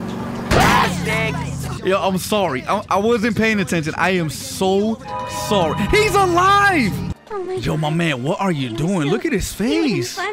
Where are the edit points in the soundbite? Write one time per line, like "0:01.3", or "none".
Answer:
0:07.1